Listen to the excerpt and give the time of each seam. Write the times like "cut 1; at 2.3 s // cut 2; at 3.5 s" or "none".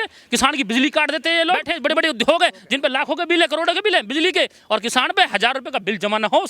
cut 1; at 1.7 s